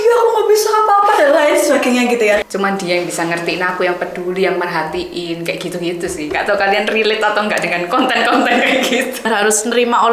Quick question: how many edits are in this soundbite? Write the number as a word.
two